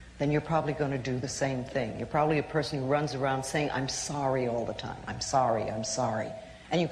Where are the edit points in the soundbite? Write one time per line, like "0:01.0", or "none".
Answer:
none